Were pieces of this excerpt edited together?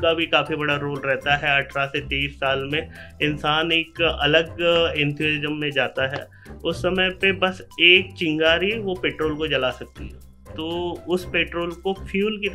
no; 0 cuts

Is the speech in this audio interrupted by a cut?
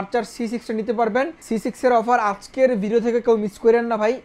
yes; 1 cut; at 1.4 s

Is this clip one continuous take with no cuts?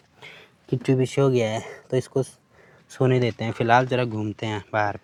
yes; 0 cuts

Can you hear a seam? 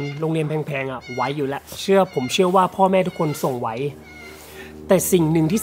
no; 0 cuts

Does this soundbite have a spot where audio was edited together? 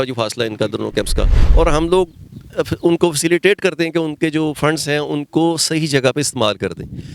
yes; 1 cut; at 1.4 s

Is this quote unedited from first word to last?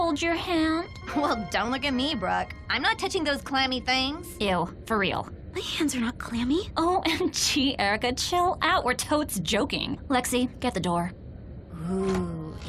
yes; 0 cuts

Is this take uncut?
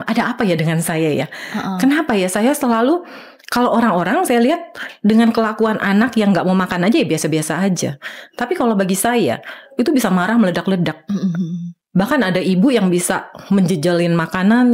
yes; 0 cuts

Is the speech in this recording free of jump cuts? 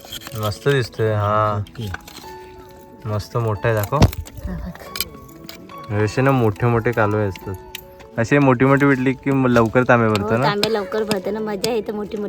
no; 1 cut; at 8.0 s

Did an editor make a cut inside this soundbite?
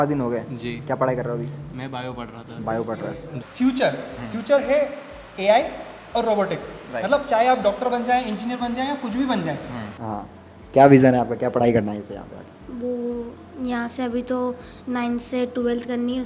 yes; 2 cuts; at 3.4 s, 9.8 s

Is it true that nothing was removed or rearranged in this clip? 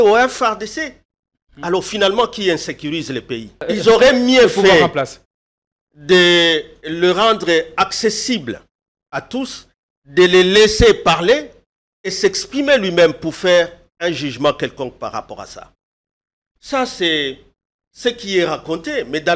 no; 1 cut; at 3.6 s

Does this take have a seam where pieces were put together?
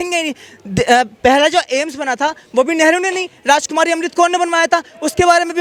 no; 0 cuts

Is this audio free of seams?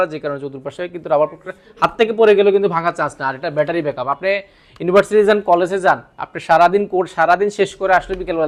yes; 0 cuts

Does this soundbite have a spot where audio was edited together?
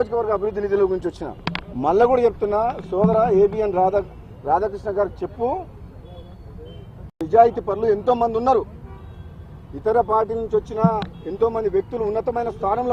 yes; 1 cut; at 7.2 s

